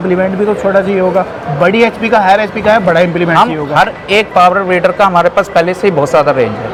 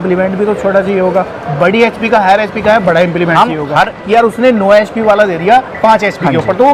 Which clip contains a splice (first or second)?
second